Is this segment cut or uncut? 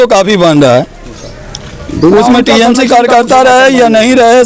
uncut